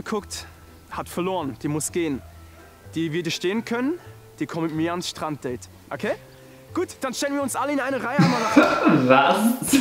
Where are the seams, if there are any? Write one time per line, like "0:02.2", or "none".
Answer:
none